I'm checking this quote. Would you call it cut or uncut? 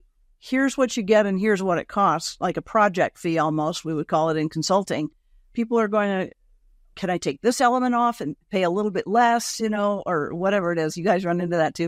uncut